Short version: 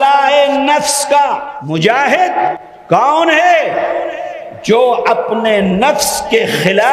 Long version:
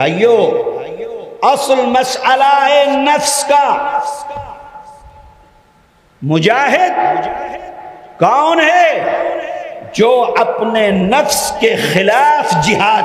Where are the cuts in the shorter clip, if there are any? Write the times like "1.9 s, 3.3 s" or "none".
1.5 s, 2.6 s